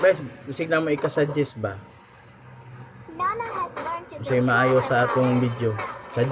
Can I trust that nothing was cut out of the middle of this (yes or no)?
yes